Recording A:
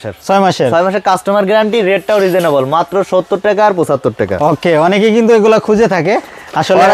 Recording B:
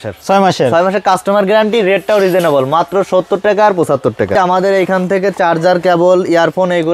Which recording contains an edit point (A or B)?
B